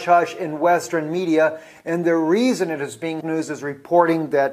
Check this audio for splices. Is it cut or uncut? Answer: uncut